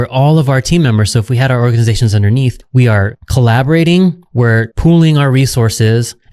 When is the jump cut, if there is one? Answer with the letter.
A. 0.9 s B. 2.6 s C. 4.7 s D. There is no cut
B